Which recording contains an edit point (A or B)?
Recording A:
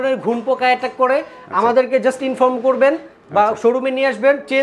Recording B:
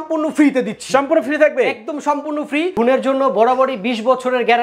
B